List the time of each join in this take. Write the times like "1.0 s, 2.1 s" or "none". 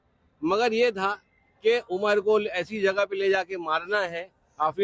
none